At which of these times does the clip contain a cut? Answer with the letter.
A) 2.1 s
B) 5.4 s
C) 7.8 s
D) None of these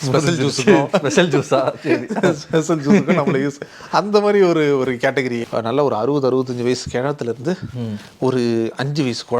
B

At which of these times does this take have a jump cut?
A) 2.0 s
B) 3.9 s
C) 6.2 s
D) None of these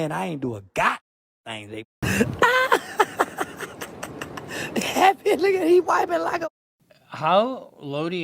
A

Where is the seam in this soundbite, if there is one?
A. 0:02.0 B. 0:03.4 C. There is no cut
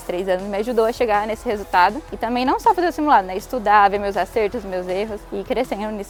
C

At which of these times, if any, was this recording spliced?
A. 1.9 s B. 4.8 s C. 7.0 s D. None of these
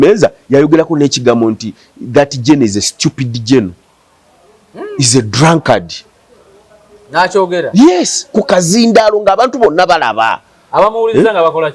D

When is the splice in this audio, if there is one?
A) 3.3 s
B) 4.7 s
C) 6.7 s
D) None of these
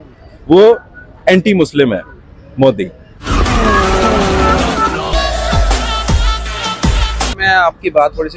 A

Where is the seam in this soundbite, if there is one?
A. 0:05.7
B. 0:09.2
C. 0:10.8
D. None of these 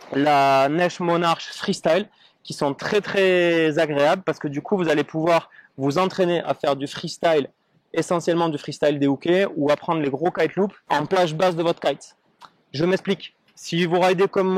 C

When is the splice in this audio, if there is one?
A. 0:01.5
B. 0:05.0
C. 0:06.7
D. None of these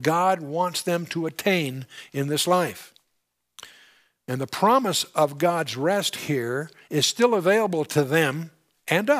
B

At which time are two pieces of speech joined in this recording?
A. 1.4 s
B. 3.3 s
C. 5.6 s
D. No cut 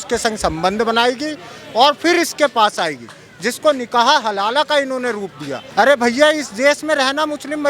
C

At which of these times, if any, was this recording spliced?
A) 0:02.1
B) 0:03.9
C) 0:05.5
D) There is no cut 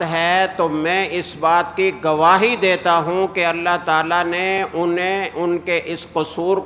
D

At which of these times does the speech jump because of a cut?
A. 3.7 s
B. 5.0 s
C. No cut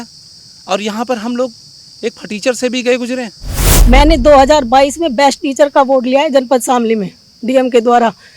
A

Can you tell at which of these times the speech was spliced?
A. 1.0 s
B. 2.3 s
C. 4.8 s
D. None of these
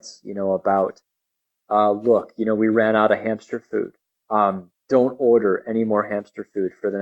D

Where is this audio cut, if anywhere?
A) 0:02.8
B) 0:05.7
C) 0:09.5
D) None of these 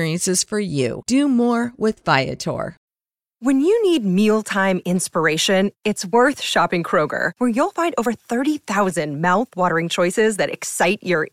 A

